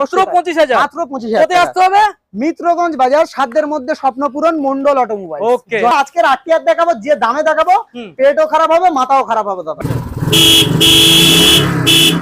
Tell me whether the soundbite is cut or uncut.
cut